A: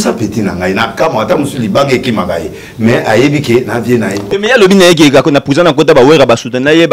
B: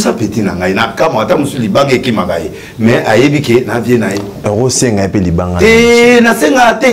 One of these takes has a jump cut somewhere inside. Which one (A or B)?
A